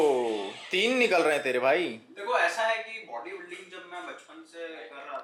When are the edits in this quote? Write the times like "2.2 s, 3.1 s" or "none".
none